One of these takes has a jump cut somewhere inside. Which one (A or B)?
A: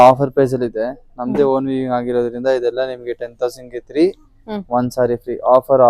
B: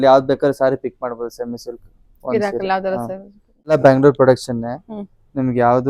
B